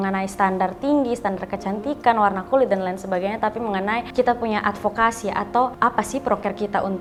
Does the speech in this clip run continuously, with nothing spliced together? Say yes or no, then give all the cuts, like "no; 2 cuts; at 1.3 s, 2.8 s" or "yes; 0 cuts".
yes; 0 cuts